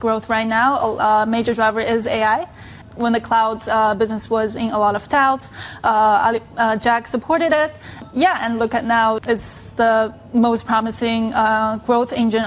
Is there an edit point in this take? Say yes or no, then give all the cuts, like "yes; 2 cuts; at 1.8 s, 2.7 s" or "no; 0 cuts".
yes; 3 cuts; at 2.8 s, 8.0 s, 9.2 s